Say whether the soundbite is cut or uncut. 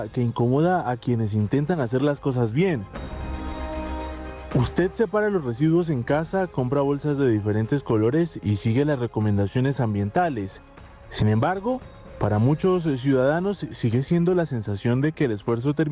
uncut